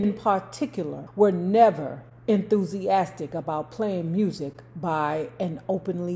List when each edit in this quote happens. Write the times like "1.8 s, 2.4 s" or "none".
1.0 s